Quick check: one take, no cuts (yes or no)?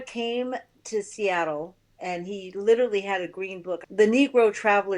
no